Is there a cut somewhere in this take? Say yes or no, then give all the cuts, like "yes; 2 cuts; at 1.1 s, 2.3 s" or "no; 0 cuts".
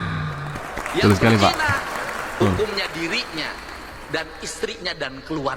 no; 0 cuts